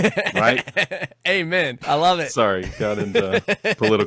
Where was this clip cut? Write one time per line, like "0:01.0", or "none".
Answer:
0:01.8